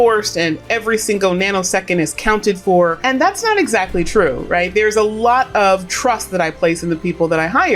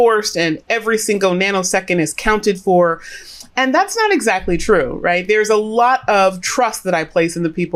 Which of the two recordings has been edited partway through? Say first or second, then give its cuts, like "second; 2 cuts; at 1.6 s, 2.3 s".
first; 1 cut; at 3.0 s